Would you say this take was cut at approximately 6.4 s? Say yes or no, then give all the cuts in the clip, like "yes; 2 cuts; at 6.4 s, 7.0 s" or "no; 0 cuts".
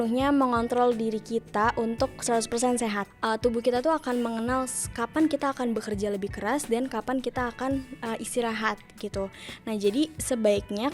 no; 1 cut; at 3.1 s